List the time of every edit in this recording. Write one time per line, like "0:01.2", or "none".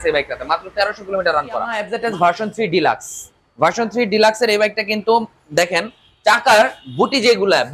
0:01.8